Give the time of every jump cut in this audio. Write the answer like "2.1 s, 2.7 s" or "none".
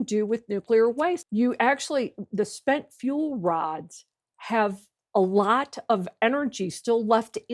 1.2 s